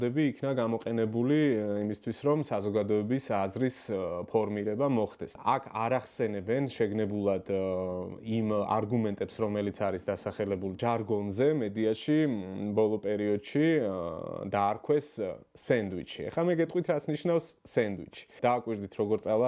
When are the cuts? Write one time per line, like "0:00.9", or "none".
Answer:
0:05.3
0:10.8
0:18.3